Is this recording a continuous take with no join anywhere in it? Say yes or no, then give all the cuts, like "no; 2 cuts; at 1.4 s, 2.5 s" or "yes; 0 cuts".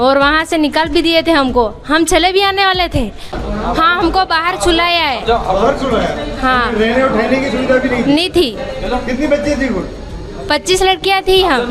yes; 0 cuts